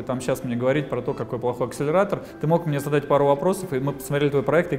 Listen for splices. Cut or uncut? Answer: uncut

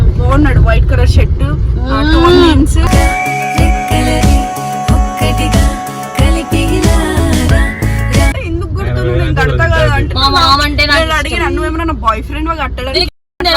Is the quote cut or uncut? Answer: cut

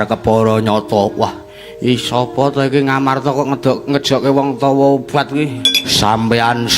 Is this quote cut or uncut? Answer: cut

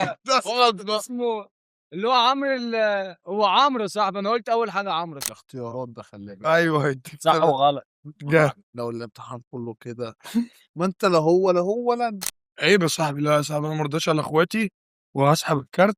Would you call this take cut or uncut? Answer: cut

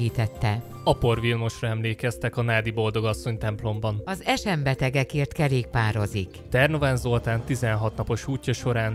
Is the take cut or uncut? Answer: cut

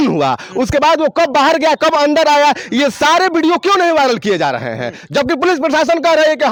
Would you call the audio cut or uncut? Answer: uncut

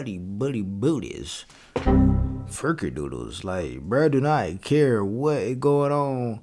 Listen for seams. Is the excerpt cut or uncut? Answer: uncut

